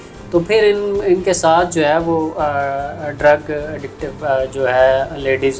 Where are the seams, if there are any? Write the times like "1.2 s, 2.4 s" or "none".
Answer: none